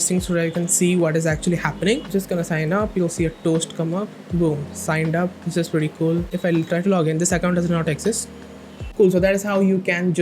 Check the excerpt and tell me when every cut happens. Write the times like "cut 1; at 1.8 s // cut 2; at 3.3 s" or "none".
cut 1; at 2.1 s // cut 2; at 6.3 s // cut 3; at 8.8 s